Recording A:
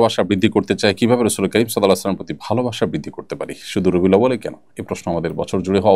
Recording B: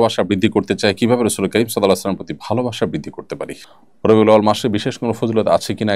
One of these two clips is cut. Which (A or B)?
B